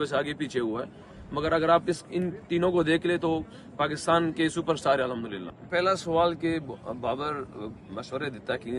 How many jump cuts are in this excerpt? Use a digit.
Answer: 1